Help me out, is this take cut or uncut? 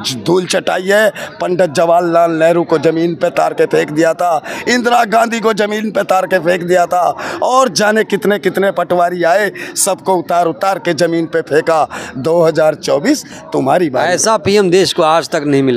uncut